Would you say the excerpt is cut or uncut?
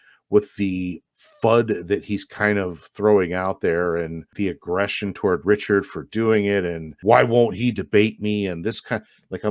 cut